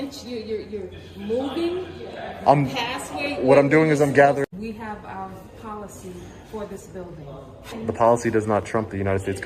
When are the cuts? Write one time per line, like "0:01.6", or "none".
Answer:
0:04.5
0:07.8